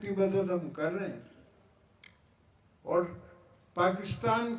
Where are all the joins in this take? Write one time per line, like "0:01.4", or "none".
none